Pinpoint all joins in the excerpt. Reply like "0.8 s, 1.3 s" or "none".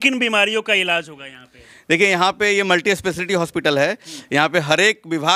none